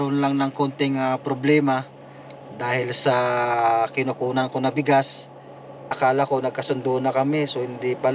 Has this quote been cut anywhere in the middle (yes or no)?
yes